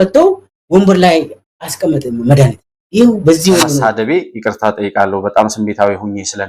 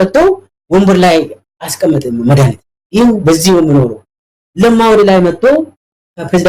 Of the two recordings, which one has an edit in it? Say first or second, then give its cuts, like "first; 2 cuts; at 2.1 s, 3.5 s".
first; 1 cut; at 3.8 s